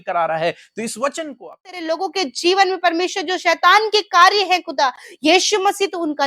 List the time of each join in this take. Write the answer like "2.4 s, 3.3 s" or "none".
1.8 s